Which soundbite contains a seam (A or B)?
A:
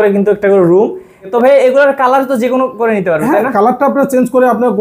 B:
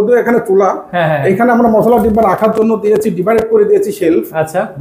A